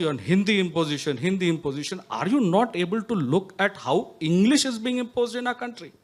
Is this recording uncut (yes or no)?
yes